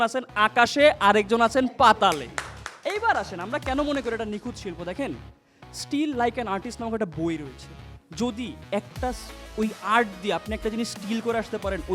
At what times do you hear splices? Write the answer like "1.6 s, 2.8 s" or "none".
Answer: none